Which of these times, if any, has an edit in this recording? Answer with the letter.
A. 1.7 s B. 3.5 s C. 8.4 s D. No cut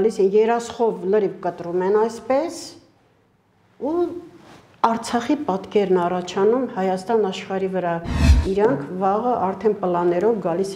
C